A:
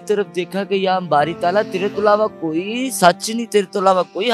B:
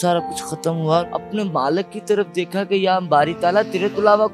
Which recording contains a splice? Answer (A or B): B